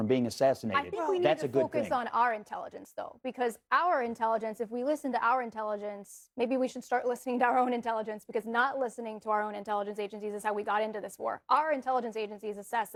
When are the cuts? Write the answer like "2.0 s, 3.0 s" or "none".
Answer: none